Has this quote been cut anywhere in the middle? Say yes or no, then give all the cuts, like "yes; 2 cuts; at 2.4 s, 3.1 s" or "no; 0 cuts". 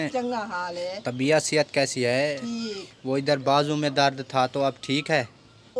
no; 0 cuts